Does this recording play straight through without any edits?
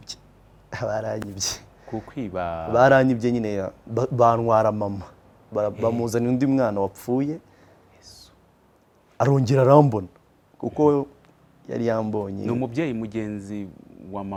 yes; 0 cuts

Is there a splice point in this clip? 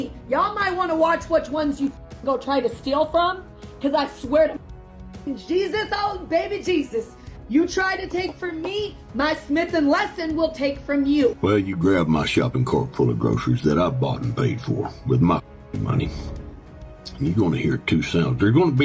yes; 1 cut; at 11.4 s

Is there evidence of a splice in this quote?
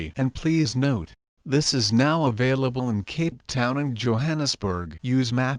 no; 0 cuts

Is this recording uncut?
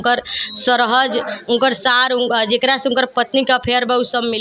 yes; 0 cuts

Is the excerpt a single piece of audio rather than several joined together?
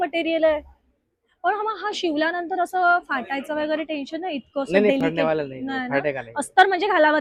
yes; 0 cuts

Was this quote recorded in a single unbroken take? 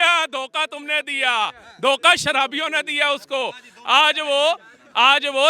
yes; 0 cuts

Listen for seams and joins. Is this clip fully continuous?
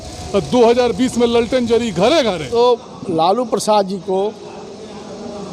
no; 1 cut; at 2.5 s

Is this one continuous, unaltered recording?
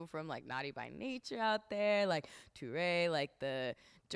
yes; 0 cuts

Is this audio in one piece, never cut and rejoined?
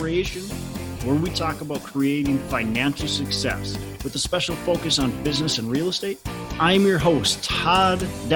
yes; 0 cuts

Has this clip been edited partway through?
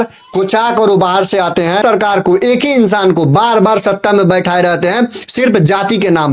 yes; 1 cut; at 1.8 s

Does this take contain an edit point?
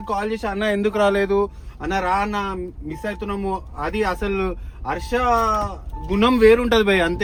no; 0 cuts

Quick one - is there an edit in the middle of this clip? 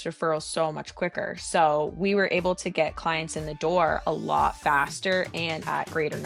no; 0 cuts

